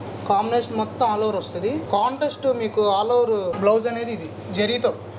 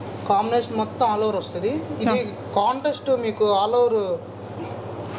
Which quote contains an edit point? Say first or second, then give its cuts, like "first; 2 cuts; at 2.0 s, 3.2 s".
first; 2 cuts; at 1.8 s, 3.6 s